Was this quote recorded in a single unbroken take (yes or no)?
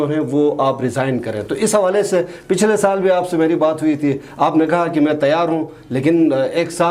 yes